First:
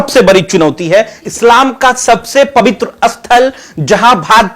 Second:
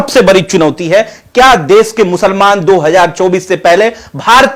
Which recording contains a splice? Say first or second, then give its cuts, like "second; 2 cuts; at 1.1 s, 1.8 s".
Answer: first; 1 cut; at 1.3 s